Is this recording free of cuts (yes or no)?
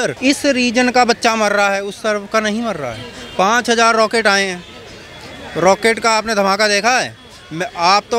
yes